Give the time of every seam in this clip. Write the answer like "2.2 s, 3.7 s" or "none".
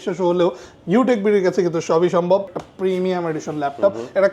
2.4 s